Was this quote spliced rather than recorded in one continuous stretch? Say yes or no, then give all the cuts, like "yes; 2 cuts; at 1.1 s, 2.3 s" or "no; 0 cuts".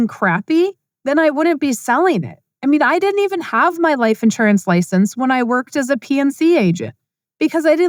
no; 0 cuts